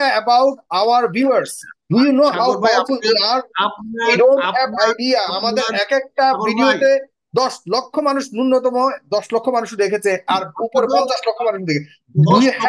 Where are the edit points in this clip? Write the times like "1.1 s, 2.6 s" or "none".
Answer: none